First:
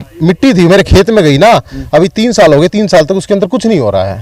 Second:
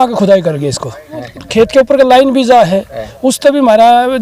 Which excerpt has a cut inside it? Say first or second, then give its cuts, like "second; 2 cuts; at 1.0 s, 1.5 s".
second; 1 cut; at 1.4 s